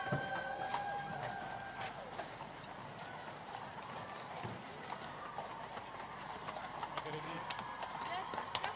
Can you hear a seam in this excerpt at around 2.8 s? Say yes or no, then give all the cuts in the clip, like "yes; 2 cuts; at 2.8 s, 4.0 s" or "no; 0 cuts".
no; 0 cuts